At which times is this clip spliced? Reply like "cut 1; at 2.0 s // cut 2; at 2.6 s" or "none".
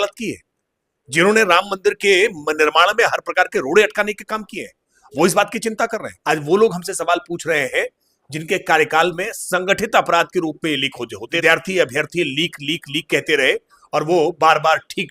cut 1; at 6.1 s // cut 2; at 11.2 s